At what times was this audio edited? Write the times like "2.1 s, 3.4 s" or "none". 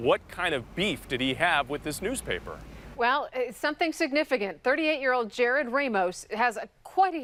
none